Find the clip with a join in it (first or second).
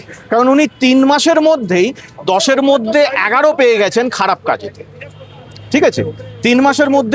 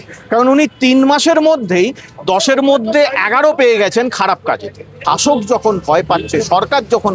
second